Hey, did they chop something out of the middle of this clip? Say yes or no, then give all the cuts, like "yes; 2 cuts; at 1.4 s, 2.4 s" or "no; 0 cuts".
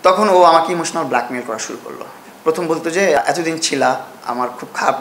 yes; 2 cuts; at 2.2 s, 3.2 s